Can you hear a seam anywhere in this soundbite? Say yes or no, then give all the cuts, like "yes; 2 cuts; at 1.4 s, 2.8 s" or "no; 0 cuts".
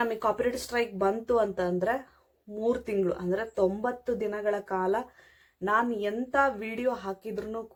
no; 0 cuts